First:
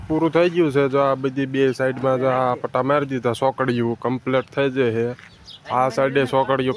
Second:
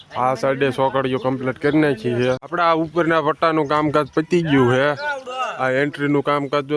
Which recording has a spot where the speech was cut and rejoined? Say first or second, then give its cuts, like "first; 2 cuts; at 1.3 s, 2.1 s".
second; 1 cut; at 2.5 s